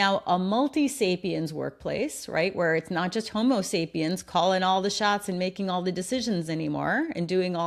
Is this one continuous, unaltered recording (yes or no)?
yes